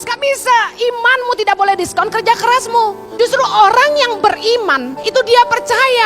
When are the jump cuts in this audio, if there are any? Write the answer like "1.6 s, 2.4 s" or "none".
3.0 s, 4.9 s